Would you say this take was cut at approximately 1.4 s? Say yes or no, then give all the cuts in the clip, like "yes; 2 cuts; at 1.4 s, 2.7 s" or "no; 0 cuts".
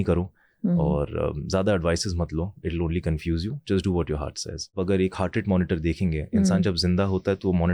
no; 1 cut; at 4.8 s